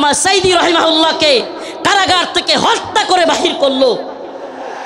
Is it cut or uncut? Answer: uncut